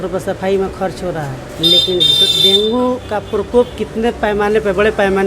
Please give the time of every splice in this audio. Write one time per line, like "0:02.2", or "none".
0:01.4